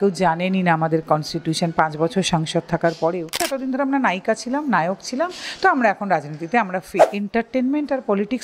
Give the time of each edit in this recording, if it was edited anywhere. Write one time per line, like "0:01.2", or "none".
0:03.5
0:07.1

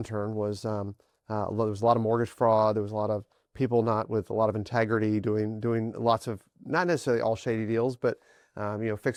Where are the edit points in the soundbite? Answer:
none

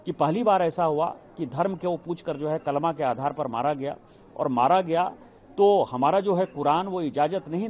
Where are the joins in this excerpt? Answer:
none

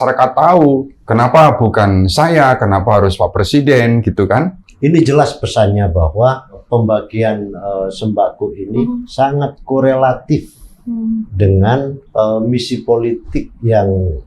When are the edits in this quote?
0:01.0
0:04.6
0:06.6
0:09.1
0:12.0

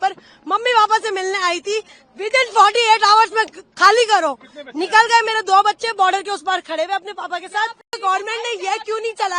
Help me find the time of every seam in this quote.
0:08.0

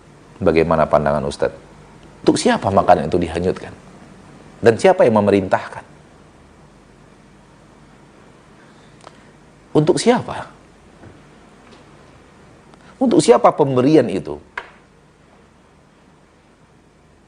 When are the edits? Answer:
0:02.2

